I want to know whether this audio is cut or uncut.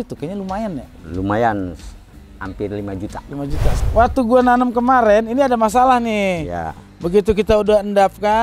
cut